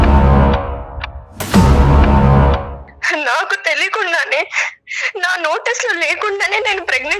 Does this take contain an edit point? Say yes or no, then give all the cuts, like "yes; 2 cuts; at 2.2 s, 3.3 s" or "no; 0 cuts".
yes; 1 cut; at 2.8 s